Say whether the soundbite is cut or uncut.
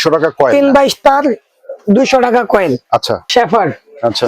cut